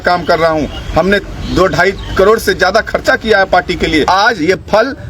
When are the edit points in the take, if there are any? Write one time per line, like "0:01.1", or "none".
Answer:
0:04.1